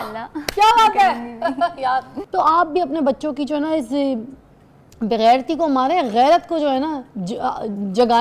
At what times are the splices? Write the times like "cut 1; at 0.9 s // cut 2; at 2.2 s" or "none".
cut 1; at 2.2 s